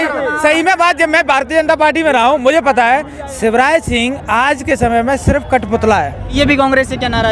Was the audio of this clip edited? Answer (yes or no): yes